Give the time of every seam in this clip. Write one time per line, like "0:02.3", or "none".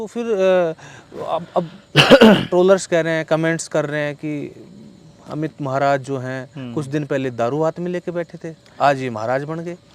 none